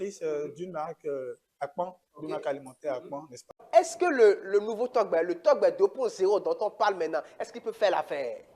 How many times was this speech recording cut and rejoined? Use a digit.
1